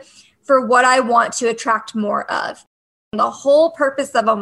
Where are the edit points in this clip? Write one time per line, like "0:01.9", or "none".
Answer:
0:03.0